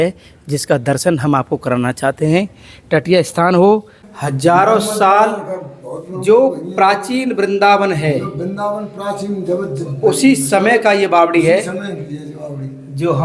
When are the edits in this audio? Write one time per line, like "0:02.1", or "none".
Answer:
0:04.0